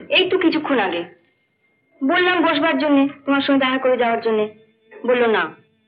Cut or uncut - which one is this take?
uncut